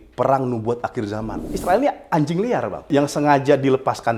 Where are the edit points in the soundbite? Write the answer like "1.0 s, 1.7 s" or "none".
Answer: 1.5 s, 2.9 s

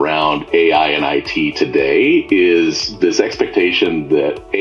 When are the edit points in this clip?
none

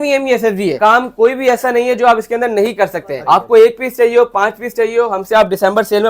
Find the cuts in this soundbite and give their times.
0.8 s, 3.1 s

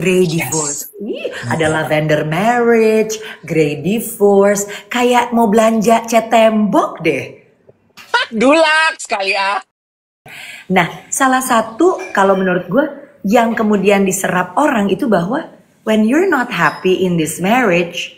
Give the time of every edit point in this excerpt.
10.2 s

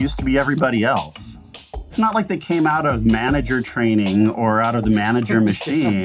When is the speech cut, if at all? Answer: 1.6 s

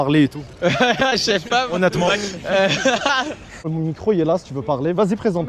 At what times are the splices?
3.7 s

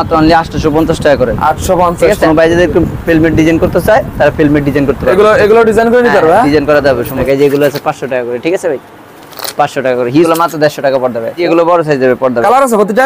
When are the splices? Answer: 2.2 s, 7.2 s, 10.3 s, 11.4 s

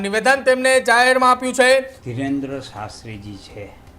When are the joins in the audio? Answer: 2.0 s

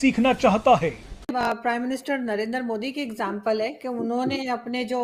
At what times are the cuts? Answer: 1.6 s

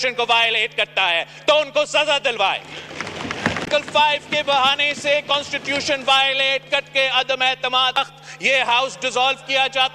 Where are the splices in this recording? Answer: 3.7 s, 8.0 s

